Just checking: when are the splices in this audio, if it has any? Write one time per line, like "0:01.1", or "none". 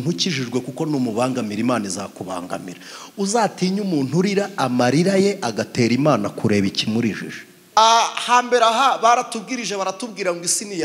0:07.8